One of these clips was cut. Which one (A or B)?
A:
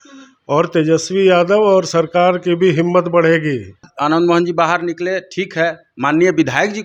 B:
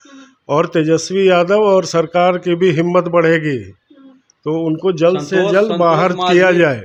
A